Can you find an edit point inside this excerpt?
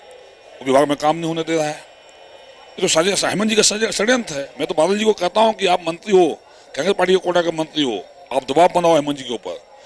no; 0 cuts

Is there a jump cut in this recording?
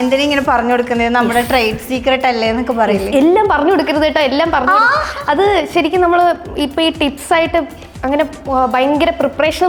no; 0 cuts

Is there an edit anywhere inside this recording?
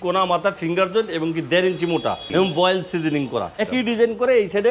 yes; 2 cuts; at 2.2 s, 3.7 s

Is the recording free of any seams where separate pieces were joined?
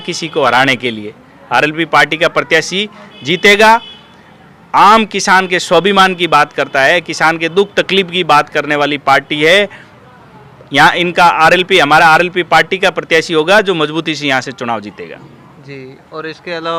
yes; 0 cuts

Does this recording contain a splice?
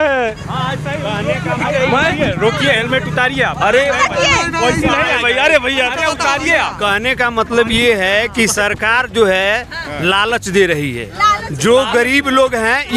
no; 0 cuts

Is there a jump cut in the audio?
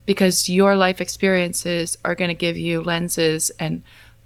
no; 0 cuts

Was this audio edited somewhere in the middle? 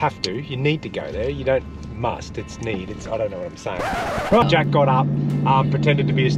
yes; 1 cut; at 4.4 s

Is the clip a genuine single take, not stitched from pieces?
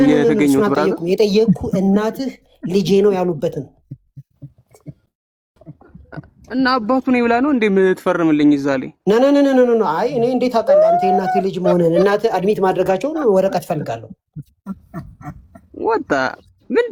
yes; 0 cuts

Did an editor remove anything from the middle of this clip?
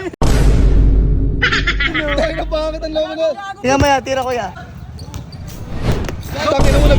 yes; 2 cuts; at 3.5 s, 4.5 s

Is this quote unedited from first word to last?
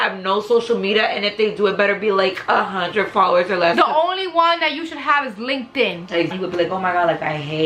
no; 1 cut; at 6.3 s

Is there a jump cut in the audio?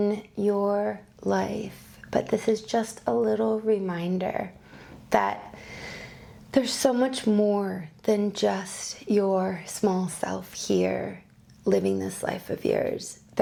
no; 0 cuts

